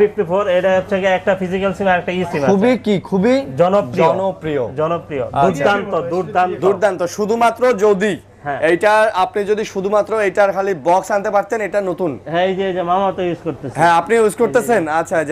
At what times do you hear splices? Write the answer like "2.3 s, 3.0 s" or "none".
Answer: none